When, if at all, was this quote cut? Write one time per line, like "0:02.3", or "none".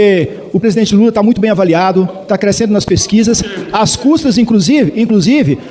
none